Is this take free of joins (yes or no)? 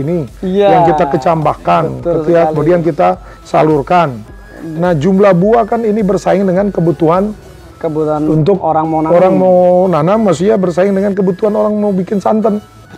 yes